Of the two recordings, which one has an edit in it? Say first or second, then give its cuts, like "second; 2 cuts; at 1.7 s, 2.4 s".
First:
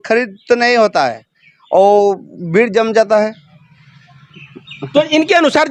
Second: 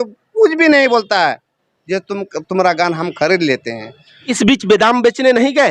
second; 1 cut; at 4.2 s